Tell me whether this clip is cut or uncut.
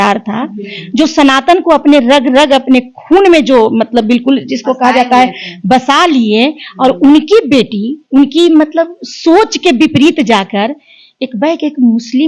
uncut